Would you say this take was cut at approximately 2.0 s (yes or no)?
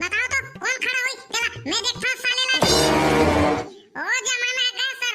no